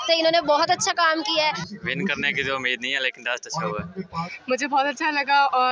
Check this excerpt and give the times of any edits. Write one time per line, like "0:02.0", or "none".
0:01.7
0:04.3